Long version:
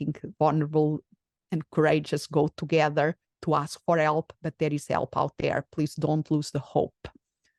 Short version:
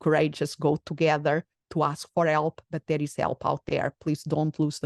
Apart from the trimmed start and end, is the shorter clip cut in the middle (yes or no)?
no